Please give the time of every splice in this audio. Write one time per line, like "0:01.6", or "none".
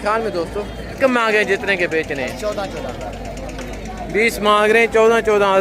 0:01.0